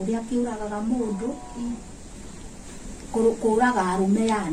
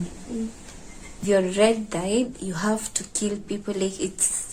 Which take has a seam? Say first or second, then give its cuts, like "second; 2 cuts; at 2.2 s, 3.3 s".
second; 1 cut; at 1.2 s